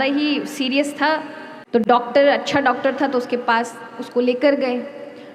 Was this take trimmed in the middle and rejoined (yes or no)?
no